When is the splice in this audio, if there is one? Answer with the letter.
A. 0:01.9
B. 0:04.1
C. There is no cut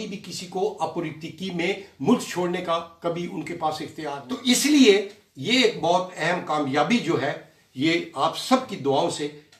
B